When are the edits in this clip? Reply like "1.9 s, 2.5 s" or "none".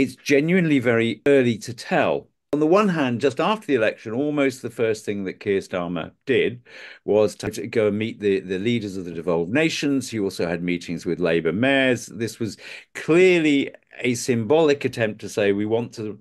1.3 s, 2.4 s, 7.6 s